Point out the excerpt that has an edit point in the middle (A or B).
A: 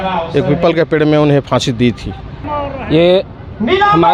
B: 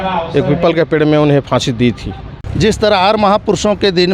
B